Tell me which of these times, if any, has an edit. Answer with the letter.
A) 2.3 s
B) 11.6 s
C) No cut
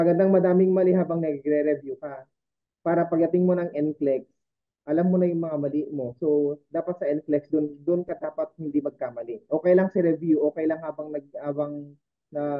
C